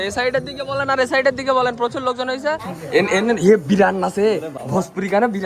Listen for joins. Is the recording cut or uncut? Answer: cut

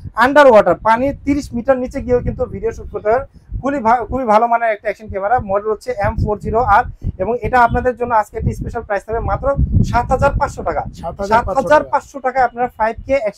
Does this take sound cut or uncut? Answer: uncut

